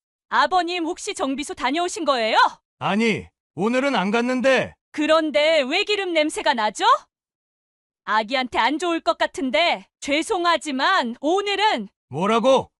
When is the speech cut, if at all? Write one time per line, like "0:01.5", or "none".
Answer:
0:02.6